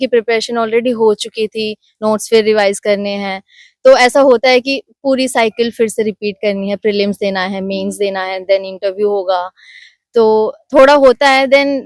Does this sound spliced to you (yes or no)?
no